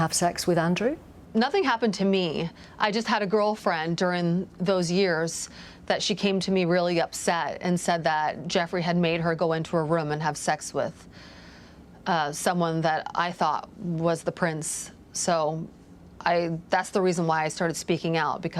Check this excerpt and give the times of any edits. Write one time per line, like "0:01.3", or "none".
0:01.1